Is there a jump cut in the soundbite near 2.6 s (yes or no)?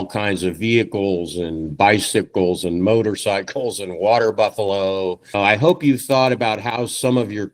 no